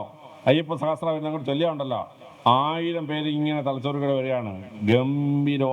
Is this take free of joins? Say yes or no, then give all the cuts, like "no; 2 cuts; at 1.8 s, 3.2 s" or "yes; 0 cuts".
yes; 0 cuts